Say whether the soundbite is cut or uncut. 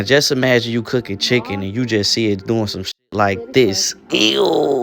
uncut